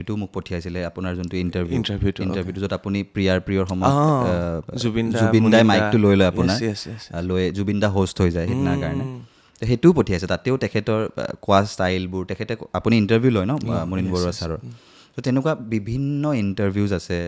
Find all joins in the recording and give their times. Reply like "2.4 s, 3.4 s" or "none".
none